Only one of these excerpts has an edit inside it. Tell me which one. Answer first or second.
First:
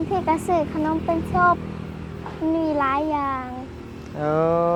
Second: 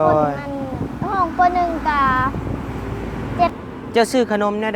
second